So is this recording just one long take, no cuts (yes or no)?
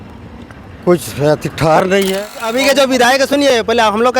no